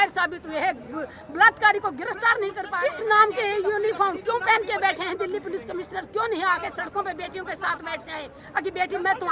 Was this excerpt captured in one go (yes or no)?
yes